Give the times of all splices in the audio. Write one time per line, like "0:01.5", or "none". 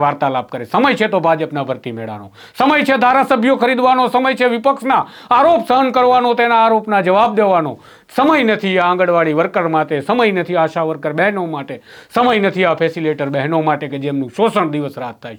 none